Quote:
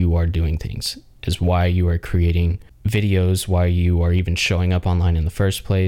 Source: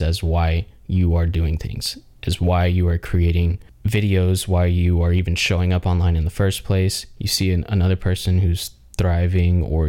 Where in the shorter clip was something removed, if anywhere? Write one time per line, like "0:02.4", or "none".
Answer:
none